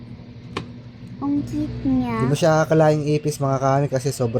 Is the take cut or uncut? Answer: cut